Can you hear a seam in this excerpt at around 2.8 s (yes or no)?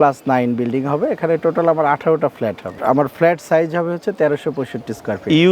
yes